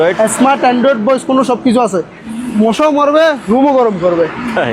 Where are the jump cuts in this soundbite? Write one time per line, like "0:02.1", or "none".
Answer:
0:02.2